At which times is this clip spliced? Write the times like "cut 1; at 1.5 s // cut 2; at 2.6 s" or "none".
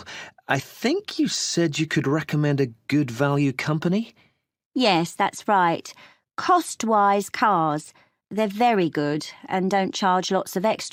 none